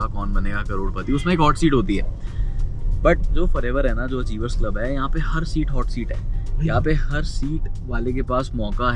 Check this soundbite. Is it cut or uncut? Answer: uncut